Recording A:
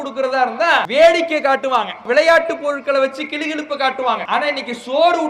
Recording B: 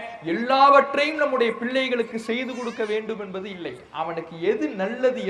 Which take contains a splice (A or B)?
A